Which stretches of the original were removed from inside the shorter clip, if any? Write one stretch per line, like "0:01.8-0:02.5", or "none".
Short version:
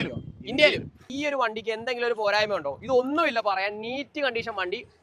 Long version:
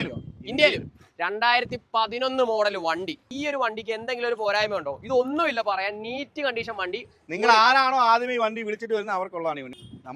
0:01.0-0:03.2